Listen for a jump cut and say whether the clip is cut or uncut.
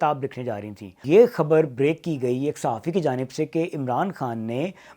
cut